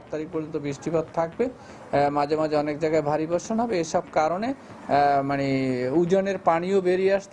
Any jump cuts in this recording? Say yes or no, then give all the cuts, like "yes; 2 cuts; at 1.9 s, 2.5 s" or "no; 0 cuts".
no; 0 cuts